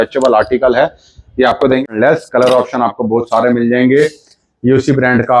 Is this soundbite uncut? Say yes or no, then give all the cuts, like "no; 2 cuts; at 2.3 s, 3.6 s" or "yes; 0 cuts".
no; 1 cut; at 1.8 s